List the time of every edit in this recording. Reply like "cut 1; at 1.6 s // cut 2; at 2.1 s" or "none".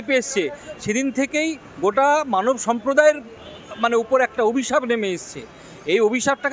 none